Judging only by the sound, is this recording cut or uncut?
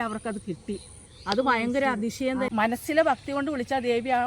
cut